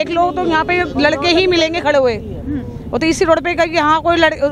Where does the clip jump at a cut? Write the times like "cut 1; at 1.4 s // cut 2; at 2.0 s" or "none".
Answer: none